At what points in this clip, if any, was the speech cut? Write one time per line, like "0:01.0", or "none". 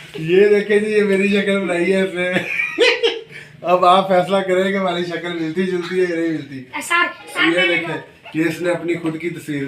0:07.3